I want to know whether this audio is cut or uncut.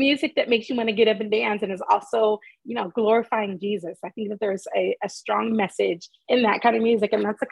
uncut